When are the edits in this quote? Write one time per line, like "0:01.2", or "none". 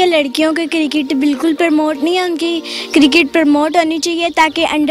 none